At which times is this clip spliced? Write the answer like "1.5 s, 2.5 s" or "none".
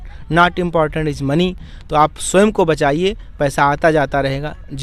none